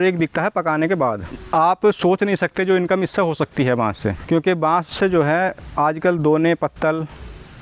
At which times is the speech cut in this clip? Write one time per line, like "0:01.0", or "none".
0:01.3
0:04.2